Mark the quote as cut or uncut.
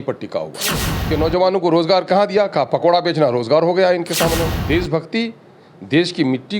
cut